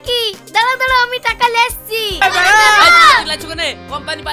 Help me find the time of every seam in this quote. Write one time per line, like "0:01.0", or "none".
0:02.2